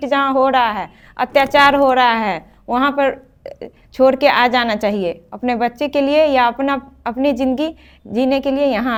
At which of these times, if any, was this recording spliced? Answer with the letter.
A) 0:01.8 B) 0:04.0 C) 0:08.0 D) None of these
D